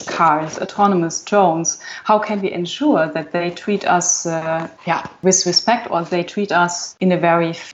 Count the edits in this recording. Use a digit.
2